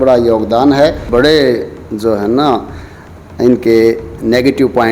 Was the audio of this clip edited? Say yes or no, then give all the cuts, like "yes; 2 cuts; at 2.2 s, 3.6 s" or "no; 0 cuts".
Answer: yes; 1 cut; at 1.0 s